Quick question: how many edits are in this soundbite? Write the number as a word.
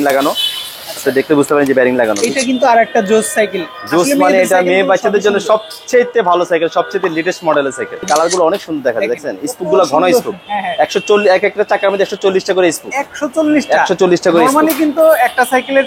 two